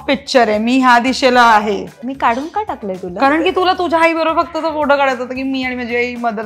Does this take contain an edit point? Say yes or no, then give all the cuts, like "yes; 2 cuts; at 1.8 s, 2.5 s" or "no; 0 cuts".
yes; 1 cut; at 1.9 s